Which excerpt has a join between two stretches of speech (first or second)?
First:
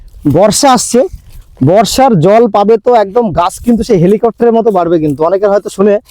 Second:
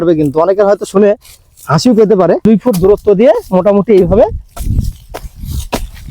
second